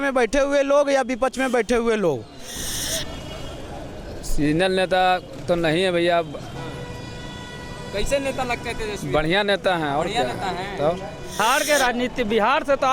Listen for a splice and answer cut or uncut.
cut